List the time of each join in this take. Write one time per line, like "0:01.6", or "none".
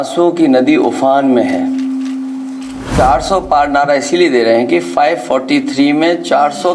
0:02.9